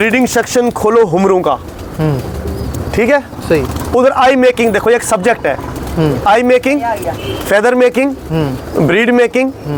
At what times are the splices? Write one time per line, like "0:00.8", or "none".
none